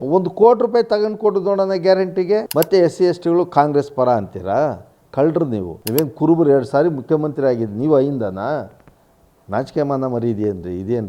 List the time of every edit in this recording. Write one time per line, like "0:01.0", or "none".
0:02.5
0:05.7